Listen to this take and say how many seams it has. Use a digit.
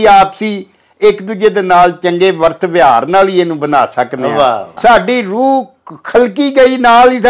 1